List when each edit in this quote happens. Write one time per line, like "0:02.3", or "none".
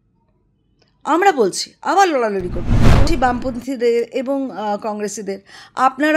0:03.0